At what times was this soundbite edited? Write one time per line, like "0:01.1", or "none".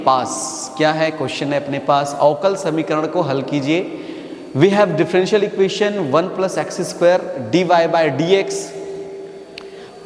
none